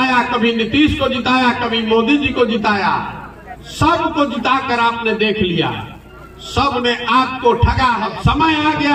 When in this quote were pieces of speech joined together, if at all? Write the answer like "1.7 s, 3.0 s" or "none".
8.1 s